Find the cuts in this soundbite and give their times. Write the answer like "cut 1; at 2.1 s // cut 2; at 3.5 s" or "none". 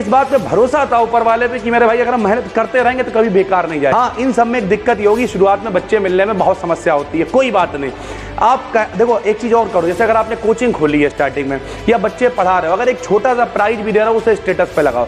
cut 1; at 3.9 s